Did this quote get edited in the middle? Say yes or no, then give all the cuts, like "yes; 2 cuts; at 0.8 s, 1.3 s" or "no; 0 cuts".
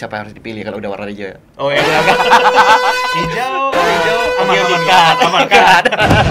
no; 0 cuts